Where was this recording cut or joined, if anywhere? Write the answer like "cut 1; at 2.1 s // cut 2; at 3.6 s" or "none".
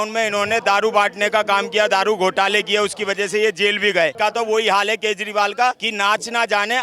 cut 1; at 4.1 s // cut 2; at 5.9 s